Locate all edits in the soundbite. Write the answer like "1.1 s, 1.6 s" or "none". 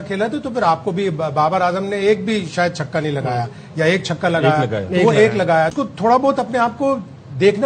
5.8 s